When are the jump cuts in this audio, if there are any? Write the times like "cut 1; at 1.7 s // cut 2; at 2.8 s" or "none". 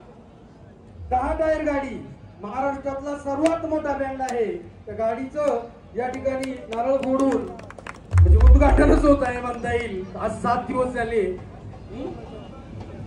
none